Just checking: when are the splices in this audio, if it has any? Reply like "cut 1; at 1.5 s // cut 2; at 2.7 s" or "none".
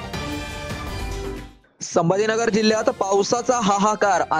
cut 1; at 1.3 s